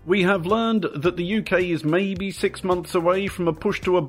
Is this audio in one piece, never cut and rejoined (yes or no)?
no